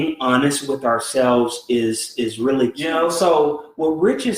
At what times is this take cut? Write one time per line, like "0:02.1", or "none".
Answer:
0:02.8